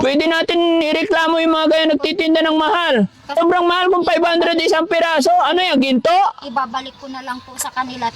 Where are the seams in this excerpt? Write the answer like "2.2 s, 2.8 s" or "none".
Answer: 3.3 s